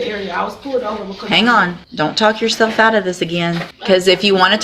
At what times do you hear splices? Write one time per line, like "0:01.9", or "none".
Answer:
0:01.8
0:03.7